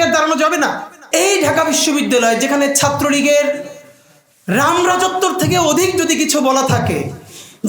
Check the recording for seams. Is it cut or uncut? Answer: cut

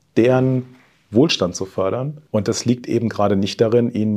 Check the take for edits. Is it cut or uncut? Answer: cut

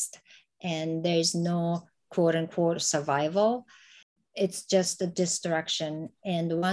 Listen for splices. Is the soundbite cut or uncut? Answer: uncut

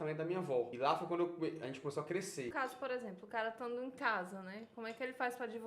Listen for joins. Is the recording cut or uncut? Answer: cut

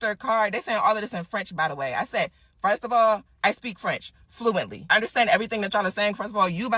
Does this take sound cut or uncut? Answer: cut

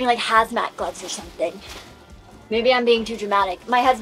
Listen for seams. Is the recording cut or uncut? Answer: uncut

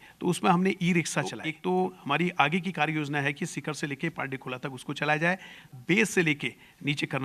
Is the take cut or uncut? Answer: cut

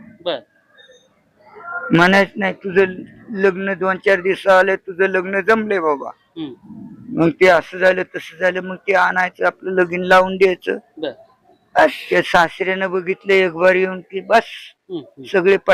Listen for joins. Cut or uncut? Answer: cut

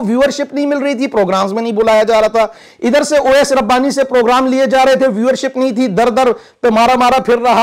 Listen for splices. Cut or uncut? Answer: uncut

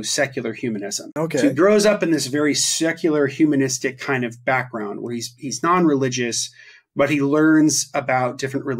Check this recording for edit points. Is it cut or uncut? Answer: cut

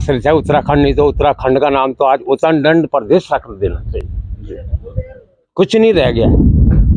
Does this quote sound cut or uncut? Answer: uncut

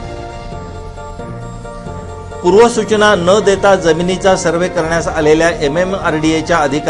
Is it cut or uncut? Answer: uncut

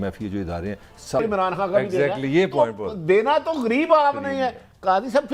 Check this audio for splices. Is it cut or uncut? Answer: cut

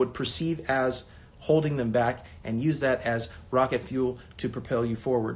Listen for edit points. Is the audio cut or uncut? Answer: uncut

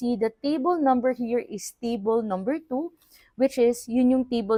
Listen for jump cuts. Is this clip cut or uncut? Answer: uncut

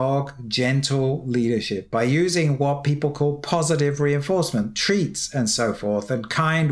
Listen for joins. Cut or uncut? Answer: uncut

